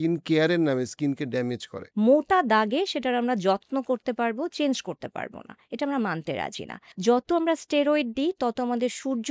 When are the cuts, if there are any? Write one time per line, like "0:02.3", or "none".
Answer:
0:01.8
0:06.9